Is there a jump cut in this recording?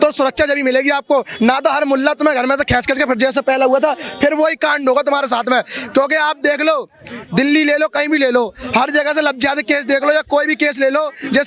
no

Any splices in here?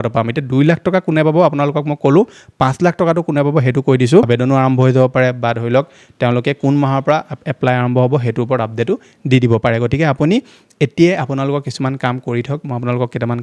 yes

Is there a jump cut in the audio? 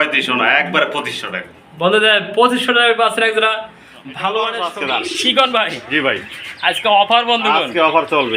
yes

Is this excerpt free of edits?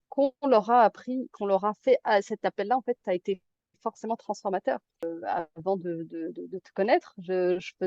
no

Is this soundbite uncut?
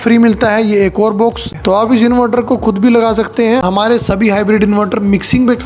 no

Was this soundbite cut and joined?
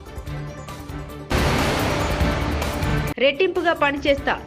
yes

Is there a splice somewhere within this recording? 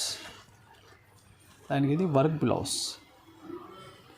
yes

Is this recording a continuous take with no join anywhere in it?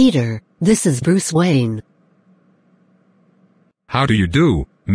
no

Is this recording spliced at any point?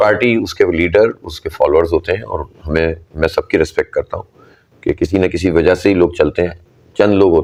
no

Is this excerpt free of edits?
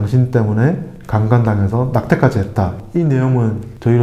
no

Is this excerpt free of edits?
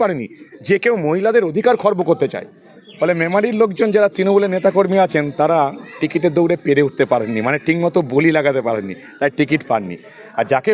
no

